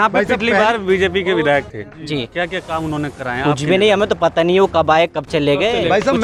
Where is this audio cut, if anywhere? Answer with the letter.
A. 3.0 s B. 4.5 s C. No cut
C